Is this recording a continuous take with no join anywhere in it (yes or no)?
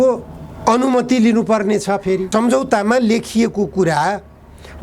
no